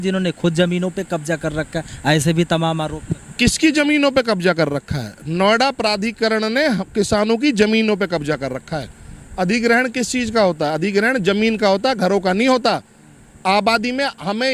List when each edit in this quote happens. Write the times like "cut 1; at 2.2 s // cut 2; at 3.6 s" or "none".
none

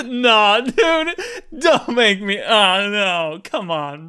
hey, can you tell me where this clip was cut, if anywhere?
none

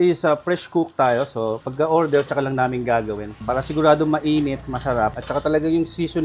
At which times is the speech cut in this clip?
none

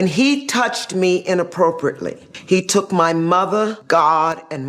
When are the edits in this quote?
cut 1; at 2.3 s // cut 2; at 3.8 s

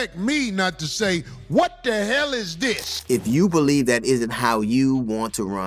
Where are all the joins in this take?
cut 1; at 2.9 s

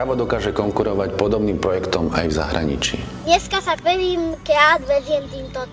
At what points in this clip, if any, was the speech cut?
cut 1; at 3.2 s

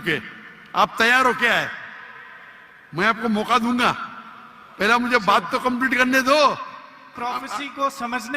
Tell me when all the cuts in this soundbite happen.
cut 1; at 7.1 s

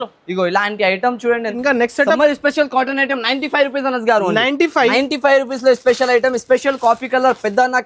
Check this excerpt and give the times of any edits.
cut 1; at 1.5 s

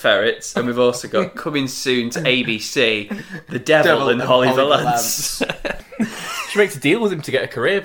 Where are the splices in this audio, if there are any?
cut 1; at 5.8 s

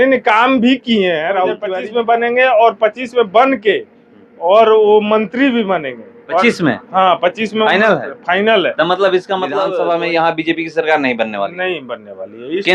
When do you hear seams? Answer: cut 1; at 1.7 s // cut 2; at 9.6 s

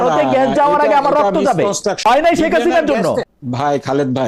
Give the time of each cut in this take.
cut 1; at 2.0 s // cut 2; at 3.3 s

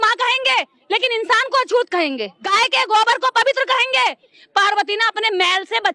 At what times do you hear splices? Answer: cut 1; at 2.5 s // cut 2; at 4.4 s

